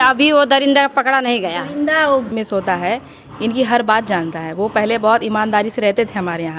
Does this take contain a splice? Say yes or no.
yes